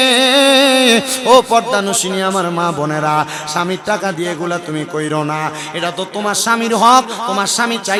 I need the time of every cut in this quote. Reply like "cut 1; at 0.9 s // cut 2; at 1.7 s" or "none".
none